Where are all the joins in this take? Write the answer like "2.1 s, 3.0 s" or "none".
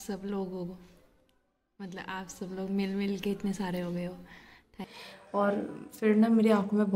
4.8 s